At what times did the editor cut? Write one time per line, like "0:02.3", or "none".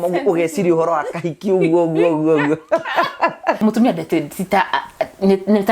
0:03.6